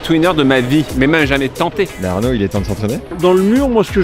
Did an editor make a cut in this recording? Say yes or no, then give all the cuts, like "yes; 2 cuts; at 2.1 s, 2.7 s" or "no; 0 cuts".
yes; 2 cuts; at 0.9 s, 3.1 s